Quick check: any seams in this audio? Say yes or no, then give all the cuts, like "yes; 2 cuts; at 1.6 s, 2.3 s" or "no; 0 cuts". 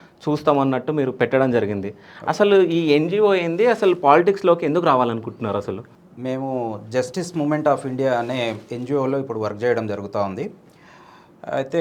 no; 0 cuts